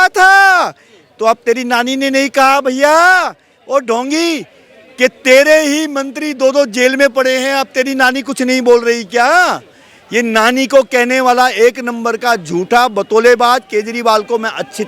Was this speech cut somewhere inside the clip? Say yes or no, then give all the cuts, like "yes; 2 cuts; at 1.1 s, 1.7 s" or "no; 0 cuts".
no; 0 cuts